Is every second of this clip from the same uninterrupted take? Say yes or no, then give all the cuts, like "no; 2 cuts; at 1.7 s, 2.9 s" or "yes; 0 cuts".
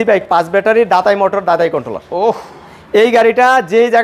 yes; 0 cuts